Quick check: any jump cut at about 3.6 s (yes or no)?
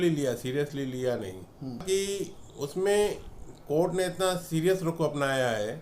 no